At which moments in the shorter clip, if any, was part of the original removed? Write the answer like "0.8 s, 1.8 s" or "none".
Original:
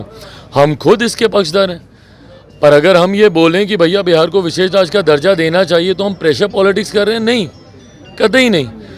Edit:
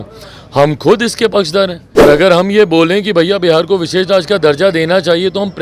2.0 s